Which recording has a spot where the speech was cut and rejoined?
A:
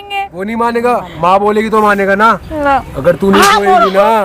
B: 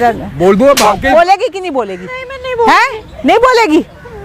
A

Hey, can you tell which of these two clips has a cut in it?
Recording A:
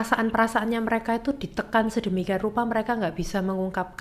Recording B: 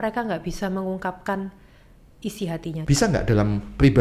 B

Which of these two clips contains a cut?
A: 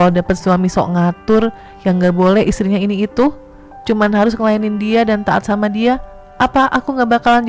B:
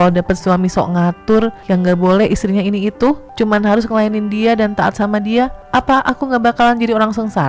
B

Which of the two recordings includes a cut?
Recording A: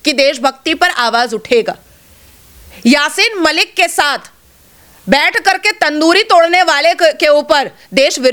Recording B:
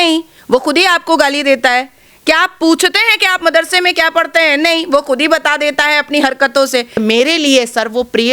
B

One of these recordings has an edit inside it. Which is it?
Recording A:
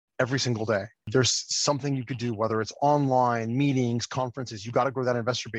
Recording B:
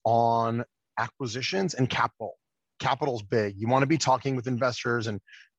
A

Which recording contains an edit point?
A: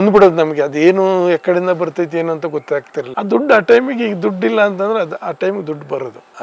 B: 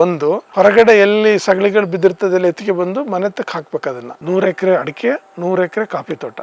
B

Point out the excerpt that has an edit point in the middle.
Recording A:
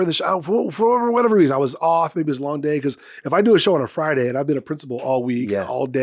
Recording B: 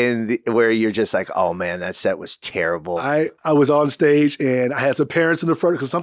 B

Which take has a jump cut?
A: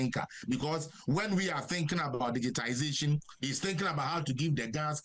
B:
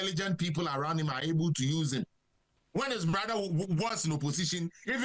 B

